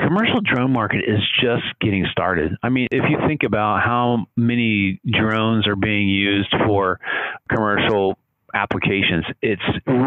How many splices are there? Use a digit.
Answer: 2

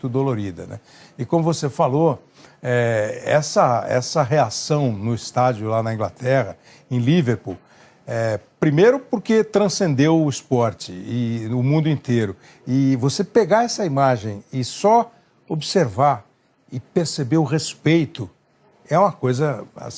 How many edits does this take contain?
1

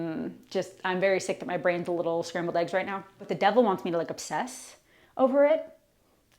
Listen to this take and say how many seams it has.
1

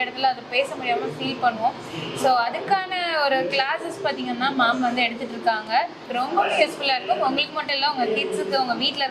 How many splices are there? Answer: 1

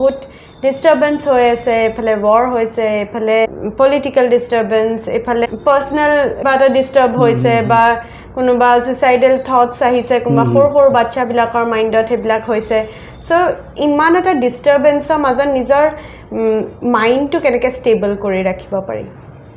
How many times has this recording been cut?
3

